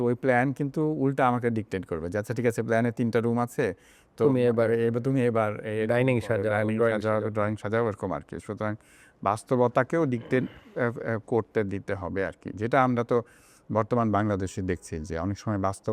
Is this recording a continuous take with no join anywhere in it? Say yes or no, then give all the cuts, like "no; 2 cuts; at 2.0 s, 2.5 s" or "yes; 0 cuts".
yes; 0 cuts